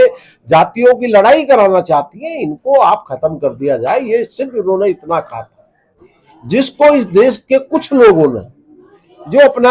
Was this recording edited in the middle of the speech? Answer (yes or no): no